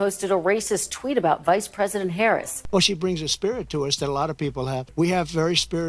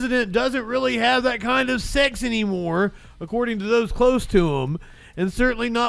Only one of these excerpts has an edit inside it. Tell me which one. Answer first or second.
first